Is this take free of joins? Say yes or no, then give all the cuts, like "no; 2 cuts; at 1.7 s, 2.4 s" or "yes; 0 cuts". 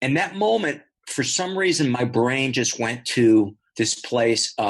no; 2 cuts; at 0.9 s, 3.6 s